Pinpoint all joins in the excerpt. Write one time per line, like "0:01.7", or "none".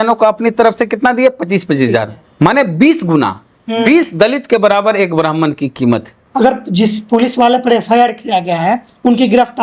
0:02.2
0:06.3